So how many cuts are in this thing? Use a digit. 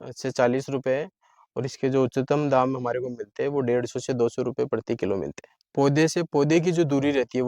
1